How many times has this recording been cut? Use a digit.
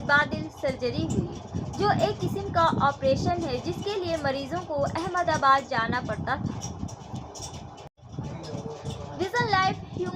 1